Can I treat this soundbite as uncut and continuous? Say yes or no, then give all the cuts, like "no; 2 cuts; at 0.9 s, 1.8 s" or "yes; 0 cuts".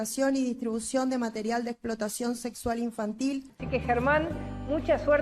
no; 1 cut; at 3.6 s